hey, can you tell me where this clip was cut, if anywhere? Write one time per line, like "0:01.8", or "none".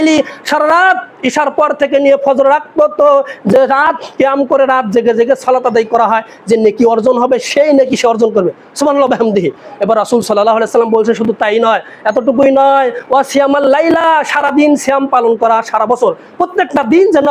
none